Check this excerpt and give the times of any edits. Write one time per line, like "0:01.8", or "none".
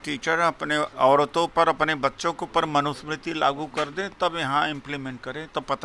0:00.9